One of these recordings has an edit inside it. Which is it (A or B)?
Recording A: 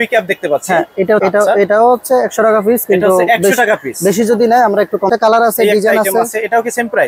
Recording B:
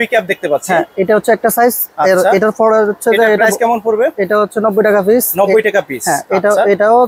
A